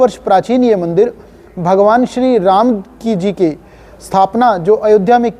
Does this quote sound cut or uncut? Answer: uncut